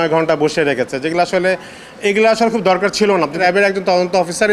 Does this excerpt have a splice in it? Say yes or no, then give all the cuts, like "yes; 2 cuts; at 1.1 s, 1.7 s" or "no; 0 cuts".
yes; 1 cut; at 3.4 s